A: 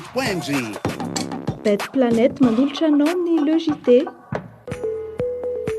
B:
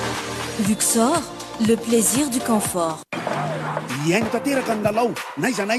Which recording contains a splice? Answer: A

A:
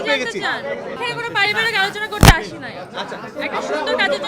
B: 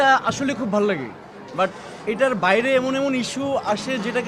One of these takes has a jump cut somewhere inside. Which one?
A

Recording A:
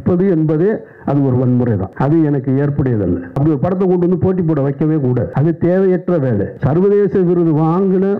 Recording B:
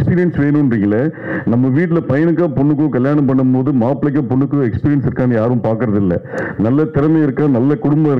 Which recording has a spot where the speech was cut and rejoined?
A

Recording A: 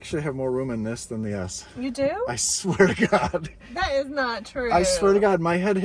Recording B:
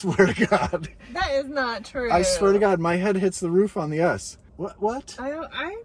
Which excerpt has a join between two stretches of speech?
B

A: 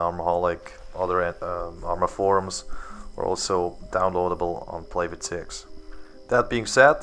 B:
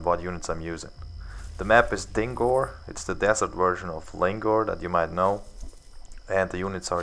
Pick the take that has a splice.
A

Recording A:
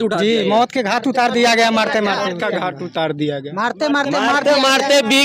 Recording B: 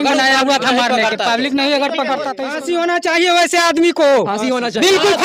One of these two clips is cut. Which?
B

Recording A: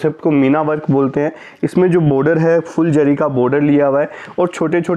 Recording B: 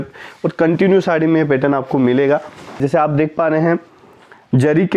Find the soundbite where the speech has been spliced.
B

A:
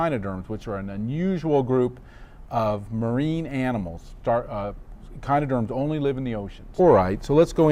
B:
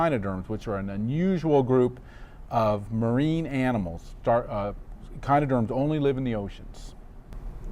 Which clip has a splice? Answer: B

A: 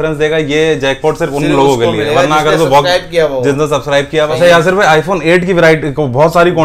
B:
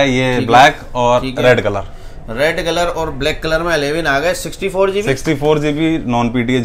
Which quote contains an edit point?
A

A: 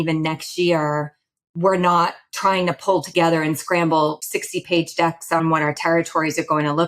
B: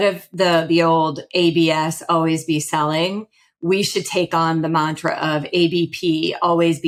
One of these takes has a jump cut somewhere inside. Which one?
A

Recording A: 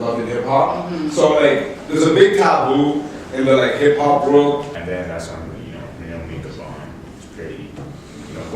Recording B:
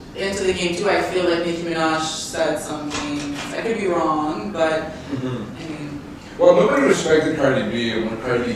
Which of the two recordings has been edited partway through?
A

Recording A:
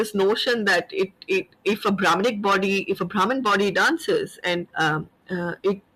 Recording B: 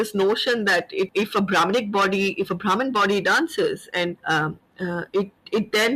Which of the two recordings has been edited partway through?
B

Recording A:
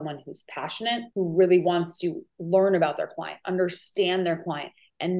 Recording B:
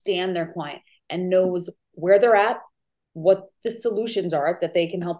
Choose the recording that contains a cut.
A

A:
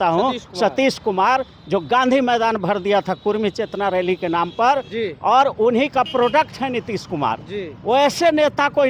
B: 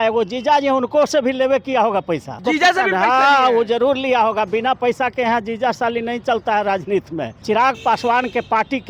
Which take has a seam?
B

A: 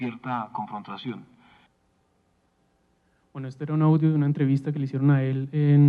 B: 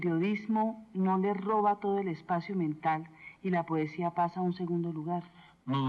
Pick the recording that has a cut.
B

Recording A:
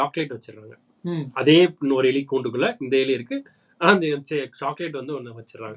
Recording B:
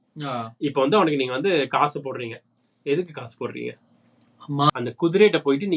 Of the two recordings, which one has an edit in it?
B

